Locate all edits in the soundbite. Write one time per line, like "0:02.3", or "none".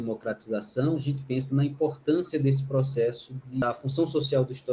0:01.1
0:03.6